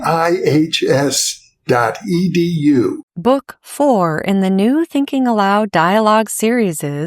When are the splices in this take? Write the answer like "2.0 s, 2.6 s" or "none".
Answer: 3.1 s